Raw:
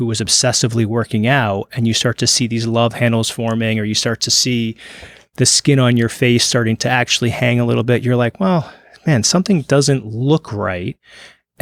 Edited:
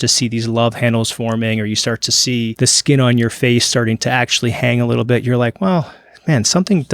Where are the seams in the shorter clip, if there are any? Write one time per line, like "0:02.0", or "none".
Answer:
0:02.5

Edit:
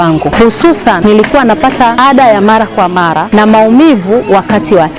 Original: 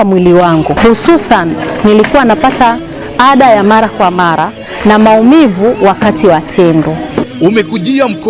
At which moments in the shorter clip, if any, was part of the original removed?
0:01.0
0:02.0
0:03.2

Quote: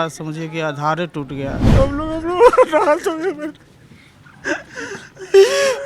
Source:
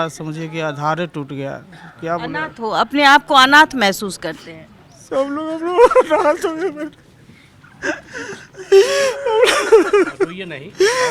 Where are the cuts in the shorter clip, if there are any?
0:01.6

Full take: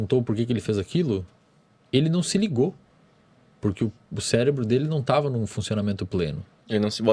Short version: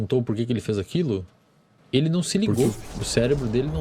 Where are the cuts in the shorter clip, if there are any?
0:02.7

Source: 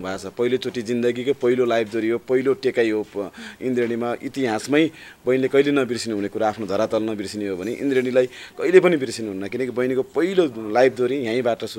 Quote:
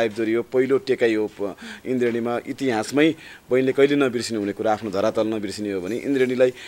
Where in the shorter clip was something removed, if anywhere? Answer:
none

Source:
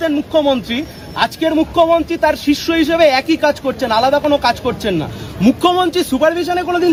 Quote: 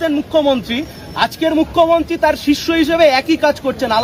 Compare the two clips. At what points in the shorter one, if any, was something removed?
none

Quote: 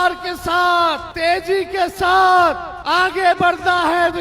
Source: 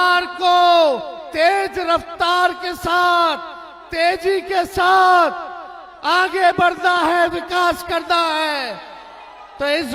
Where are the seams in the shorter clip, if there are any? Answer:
0:01.1
0:02.7

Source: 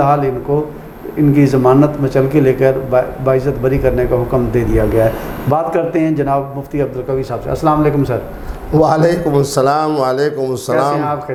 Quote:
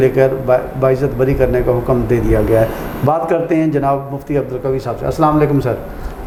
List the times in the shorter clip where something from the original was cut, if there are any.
none

